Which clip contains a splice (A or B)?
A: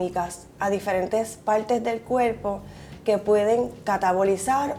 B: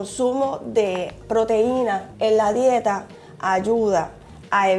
B